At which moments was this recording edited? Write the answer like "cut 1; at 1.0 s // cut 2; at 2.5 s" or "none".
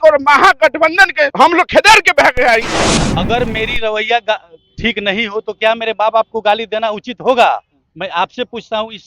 cut 1; at 1.3 s // cut 2; at 2.7 s